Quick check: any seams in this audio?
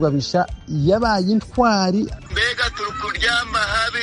yes; 1 cut; at 2.2 s

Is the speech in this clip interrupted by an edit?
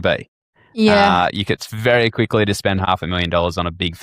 yes; 1 cut; at 2.9 s

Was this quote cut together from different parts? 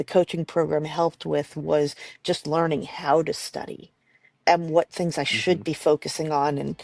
yes; 1 cut; at 4.4 s

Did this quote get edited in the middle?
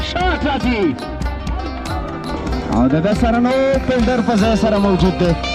no; 0 cuts

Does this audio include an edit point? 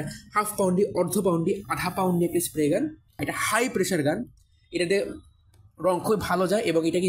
yes; 1 cut; at 3.3 s

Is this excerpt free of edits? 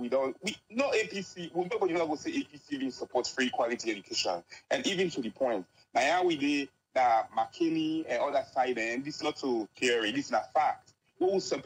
yes; 0 cuts

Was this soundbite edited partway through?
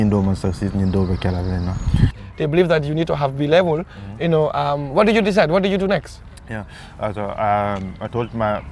yes; 1 cut; at 2.1 s

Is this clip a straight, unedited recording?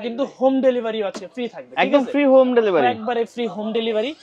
yes; 0 cuts

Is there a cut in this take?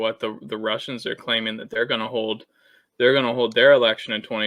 no; 0 cuts

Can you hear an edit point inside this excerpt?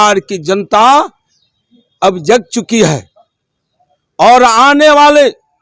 no; 0 cuts

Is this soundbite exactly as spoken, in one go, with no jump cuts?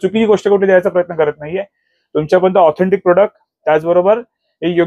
yes; 0 cuts

